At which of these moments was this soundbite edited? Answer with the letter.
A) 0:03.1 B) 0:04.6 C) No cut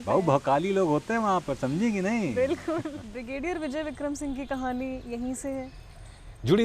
A